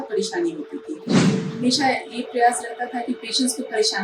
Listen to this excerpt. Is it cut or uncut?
cut